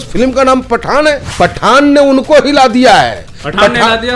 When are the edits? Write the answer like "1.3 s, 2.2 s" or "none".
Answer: 1.3 s